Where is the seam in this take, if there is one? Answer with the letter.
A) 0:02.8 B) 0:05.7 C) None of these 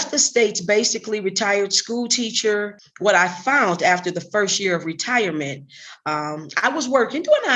A